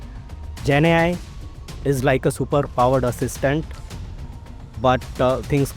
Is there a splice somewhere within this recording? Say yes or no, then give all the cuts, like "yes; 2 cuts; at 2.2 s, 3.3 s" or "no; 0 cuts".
no; 0 cuts